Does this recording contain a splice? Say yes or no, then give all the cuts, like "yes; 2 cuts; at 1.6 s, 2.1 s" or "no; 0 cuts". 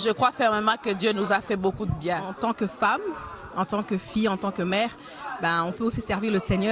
yes; 1 cut; at 2.3 s